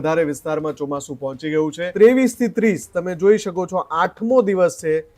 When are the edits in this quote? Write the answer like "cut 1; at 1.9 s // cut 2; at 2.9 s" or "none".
cut 1; at 1.8 s